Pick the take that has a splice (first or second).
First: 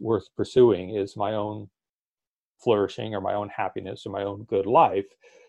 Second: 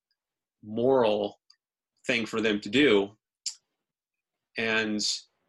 second